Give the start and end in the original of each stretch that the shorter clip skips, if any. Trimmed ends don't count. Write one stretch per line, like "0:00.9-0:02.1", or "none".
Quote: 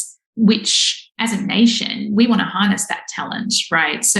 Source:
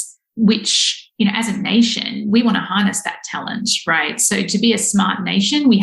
0:01.2-0:01.3